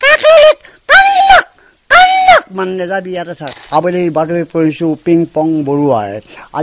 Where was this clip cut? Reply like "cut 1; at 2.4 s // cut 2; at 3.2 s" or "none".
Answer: cut 1; at 3.5 s

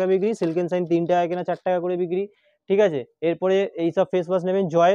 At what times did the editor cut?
none

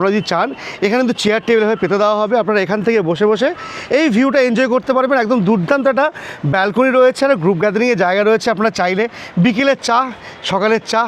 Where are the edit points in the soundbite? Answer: none

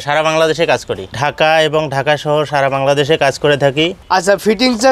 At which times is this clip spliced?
cut 1; at 1.1 s // cut 2; at 4.0 s

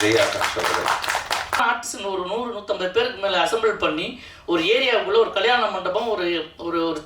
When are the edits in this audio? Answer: cut 1; at 1.6 s

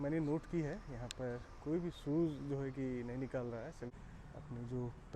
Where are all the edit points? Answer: cut 1; at 3.9 s

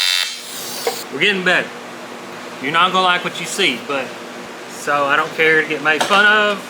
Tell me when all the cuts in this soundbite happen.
cut 1; at 1.0 s // cut 2; at 2.3 s // cut 3; at 4.5 s

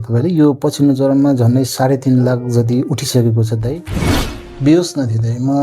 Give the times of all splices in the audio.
cut 1; at 4.3 s

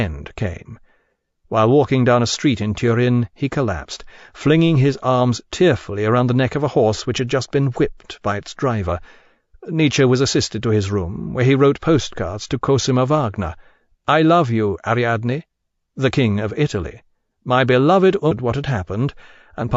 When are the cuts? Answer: none

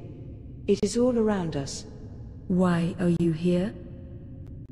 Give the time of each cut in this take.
cut 1; at 3.7 s

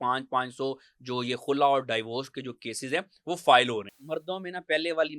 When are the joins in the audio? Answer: cut 1; at 3.9 s

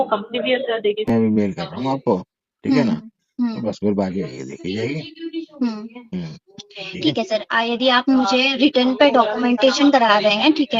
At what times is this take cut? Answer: cut 1; at 1.1 s

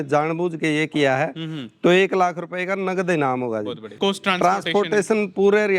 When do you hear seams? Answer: cut 1; at 3.9 s

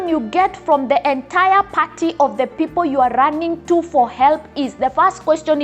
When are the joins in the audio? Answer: none

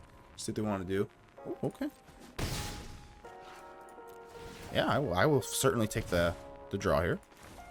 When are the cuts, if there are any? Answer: cut 1; at 1.6 s

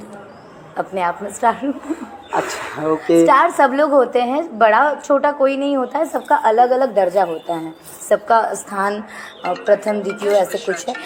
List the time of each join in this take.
none

